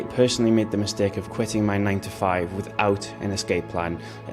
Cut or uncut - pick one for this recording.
uncut